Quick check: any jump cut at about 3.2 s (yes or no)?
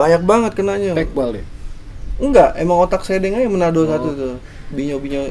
no